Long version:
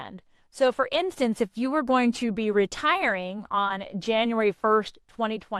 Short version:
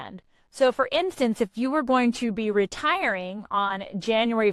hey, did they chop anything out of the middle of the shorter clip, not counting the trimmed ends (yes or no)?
no